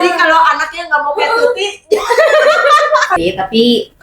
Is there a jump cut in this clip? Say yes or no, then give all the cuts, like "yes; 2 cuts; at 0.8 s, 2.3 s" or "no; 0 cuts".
yes; 1 cut; at 3.1 s